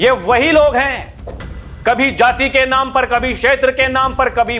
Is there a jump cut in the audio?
no; 0 cuts

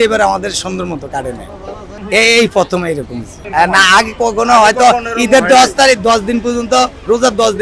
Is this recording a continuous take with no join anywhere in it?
yes; 0 cuts

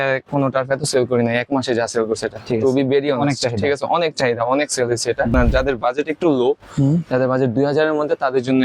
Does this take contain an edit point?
yes; 1 cut; at 5.3 s

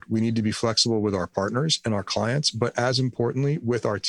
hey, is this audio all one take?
yes; 0 cuts

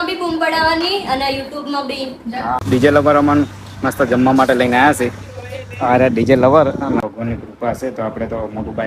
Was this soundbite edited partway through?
yes; 2 cuts; at 2.6 s, 7.0 s

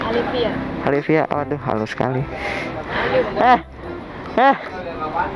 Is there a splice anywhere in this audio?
no; 0 cuts

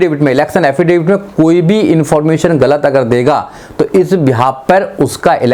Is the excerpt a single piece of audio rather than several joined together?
yes; 0 cuts

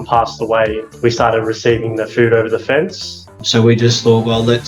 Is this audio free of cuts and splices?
no; 2 cuts; at 0.9 s, 3.3 s

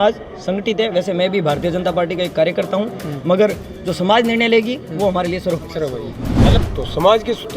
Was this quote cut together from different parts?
yes; 1 cut; at 6.4 s

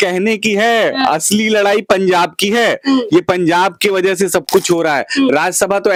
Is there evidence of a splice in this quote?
no; 0 cuts

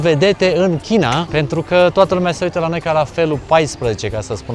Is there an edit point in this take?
yes; 1 cut; at 1.3 s

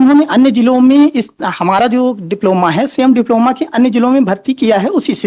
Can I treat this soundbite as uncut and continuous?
yes; 0 cuts

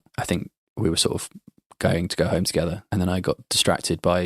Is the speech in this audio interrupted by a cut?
yes; 1 cut; at 2.8 s

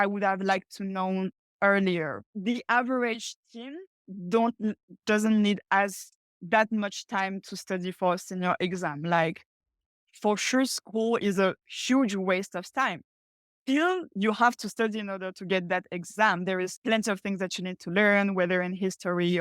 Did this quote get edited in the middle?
yes; 2 cuts; at 2.2 s, 16.7 s

